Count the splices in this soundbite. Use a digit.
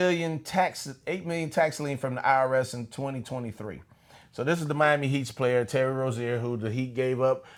0